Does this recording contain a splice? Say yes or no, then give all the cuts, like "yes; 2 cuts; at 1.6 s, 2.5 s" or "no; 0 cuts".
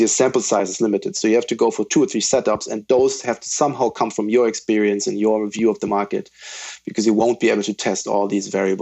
yes; 1 cut; at 1.2 s